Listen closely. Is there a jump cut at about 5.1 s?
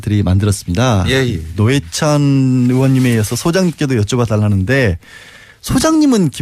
no; 0 cuts

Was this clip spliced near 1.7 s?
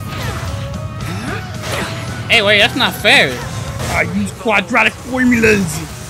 no; 1 cut; at 3.7 s

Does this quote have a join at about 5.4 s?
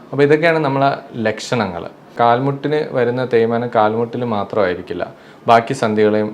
no; 1 cut; at 2.1 s

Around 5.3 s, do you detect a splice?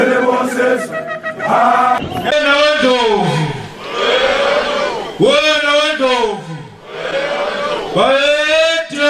no; 1 cut; at 2.3 s

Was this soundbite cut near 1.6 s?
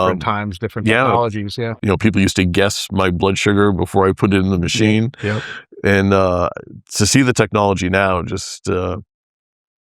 yes; 1 cut; at 1.6 s

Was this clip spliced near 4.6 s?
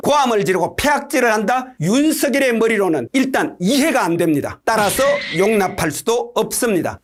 no; 0 cuts

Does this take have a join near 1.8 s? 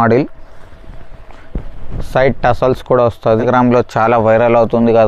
no; 1 cut; at 3.3 s

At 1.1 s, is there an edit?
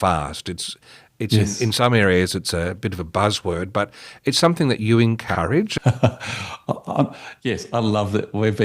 no; 1 cut; at 5.3 s

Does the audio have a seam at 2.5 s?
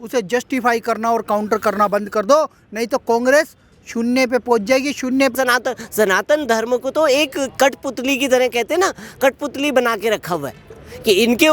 no; 1 cut; at 5.3 s

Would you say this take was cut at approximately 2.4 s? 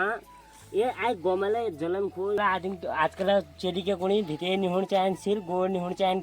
yes; 1 cut; at 2.4 s

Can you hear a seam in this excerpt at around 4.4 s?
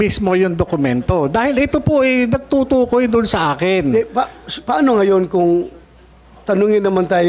no; 0 cuts

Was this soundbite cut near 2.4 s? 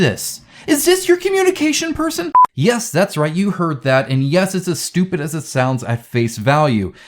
yes; 1 cut; at 2.4 s

